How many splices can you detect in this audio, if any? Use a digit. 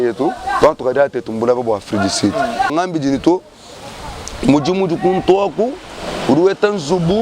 1